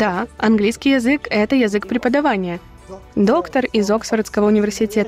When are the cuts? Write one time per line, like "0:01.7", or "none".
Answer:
0:02.6